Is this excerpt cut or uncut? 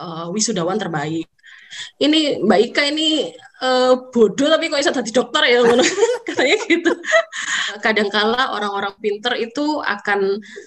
cut